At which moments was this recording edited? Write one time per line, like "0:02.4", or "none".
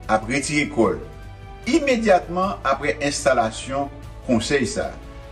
none